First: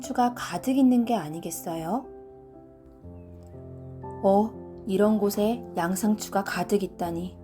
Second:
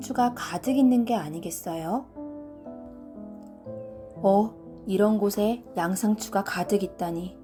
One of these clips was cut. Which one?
first; 2 cuts; at 2.1 s, 3.5 s

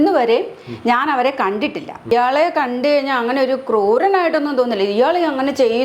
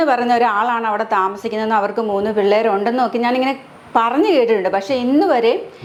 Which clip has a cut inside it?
first; 1 cut; at 2.1 s

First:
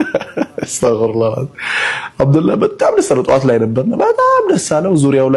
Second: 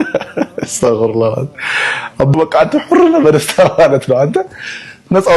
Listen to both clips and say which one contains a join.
second; 1 cut; at 2.3 s

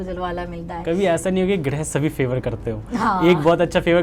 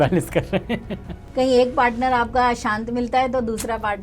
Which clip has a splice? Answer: second; 1 cut; at 1.2 s

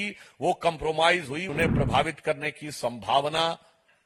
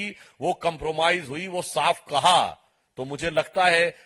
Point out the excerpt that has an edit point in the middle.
first; 1 cut; at 1.5 s

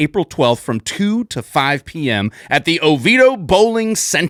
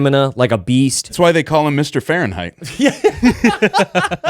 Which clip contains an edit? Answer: second; 1 cut; at 1.1 s

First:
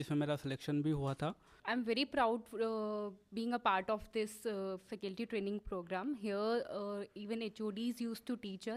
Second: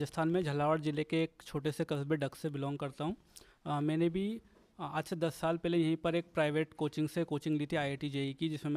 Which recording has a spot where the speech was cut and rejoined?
first; 1 cut; at 1.5 s

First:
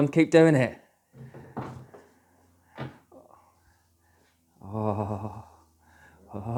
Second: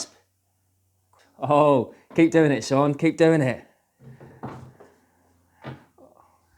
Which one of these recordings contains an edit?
second; 1 cut; at 1.1 s

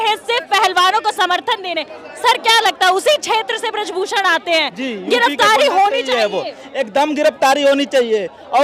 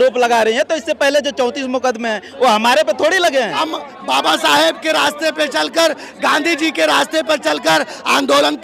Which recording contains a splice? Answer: second; 1 cut; at 3.6 s

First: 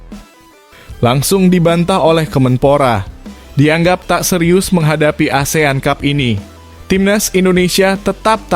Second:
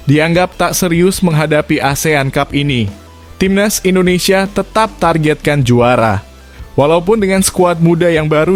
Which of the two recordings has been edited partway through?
first; 1 cut; at 0.9 s

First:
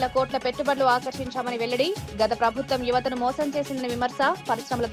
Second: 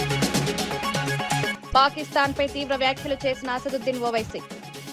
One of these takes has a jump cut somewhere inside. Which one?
second; 1 cut; at 1.5 s

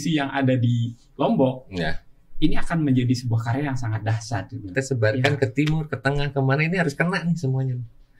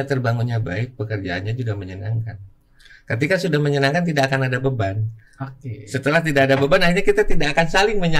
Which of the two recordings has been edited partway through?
first; 1 cut; at 4.7 s

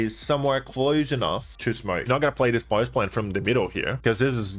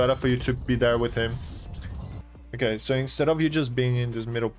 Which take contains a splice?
first; 1 cut; at 2.0 s

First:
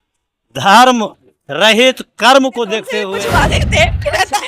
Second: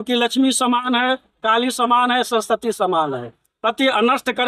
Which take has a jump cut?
first; 1 cut; at 3.1 s

